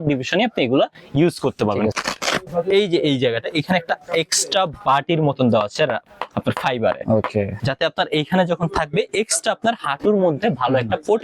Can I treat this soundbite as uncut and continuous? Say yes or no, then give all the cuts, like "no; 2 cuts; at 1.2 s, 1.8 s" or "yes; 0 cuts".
no; 2 cuts; at 1.9 s, 7.5 s